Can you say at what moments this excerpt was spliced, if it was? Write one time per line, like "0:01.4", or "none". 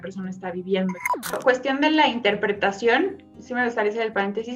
0:01.3